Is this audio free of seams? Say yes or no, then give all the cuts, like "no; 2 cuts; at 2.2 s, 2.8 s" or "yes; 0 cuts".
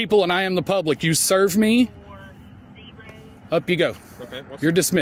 yes; 0 cuts